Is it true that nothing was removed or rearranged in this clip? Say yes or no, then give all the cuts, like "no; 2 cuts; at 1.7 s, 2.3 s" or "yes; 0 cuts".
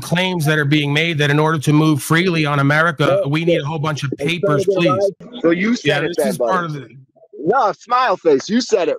yes; 0 cuts